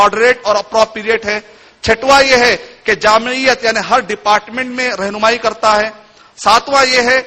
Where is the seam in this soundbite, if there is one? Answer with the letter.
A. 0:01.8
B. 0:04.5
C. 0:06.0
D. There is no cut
D